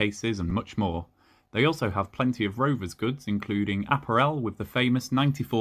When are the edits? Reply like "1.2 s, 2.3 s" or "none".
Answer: none